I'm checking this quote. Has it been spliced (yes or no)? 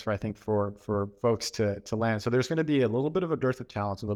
no